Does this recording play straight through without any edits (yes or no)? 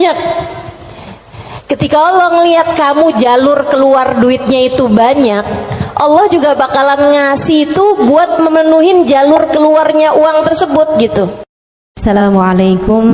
no